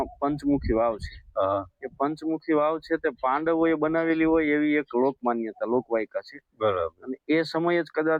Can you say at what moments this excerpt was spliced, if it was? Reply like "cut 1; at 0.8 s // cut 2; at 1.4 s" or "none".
none